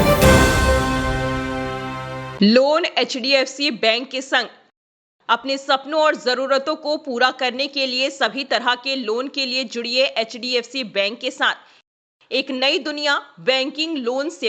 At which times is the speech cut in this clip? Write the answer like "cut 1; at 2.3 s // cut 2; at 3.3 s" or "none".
cut 1; at 2.2 s